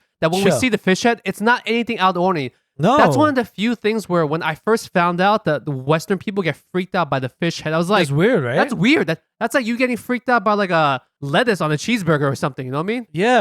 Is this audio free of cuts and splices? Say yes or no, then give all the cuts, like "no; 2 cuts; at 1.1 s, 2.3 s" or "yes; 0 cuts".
no; 1 cut; at 11.2 s